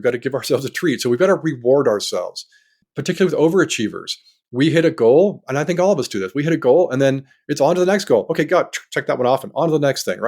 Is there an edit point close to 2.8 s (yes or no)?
yes